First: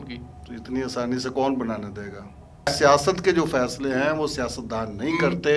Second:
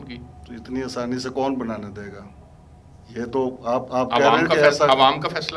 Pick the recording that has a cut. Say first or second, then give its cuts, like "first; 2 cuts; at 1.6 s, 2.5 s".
first; 1 cut; at 2.7 s